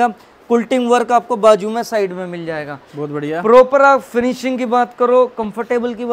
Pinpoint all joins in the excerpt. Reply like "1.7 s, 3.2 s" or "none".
none